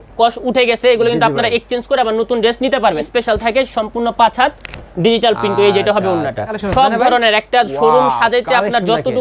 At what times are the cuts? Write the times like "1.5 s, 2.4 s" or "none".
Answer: 3.0 s, 6.6 s

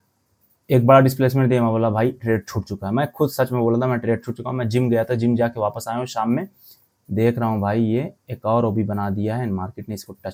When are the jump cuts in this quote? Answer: none

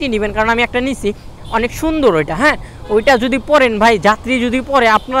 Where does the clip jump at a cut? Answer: none

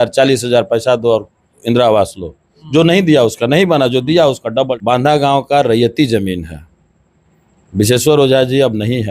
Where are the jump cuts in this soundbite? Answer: 4.8 s

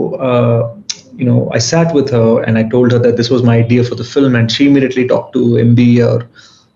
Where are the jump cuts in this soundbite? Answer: none

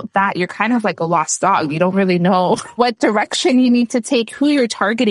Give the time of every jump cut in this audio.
2.8 s

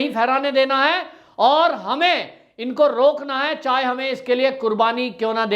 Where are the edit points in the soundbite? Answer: none

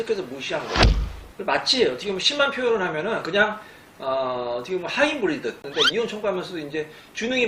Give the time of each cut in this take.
5.6 s

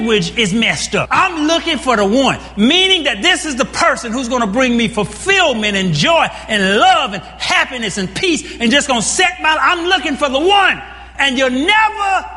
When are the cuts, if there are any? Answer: 1.1 s

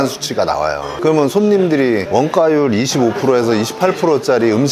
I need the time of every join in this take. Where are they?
none

